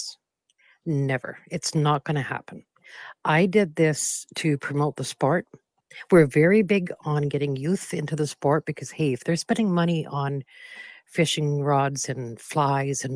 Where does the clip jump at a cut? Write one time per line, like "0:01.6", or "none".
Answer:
none